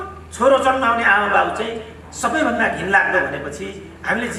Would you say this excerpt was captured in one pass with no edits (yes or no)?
yes